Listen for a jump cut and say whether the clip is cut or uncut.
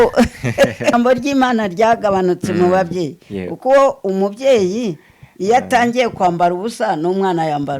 cut